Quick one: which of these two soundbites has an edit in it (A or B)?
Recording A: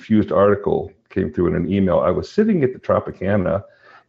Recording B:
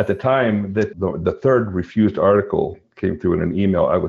B